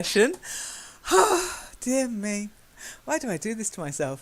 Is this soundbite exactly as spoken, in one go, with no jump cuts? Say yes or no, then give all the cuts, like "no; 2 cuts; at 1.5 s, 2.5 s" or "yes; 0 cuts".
no; 1 cut; at 2.0 s